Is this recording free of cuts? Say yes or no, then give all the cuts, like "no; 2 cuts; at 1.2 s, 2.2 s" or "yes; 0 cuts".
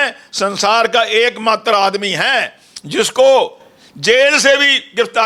yes; 0 cuts